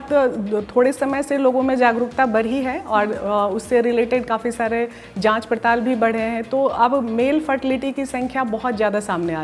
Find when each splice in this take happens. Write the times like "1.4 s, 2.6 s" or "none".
none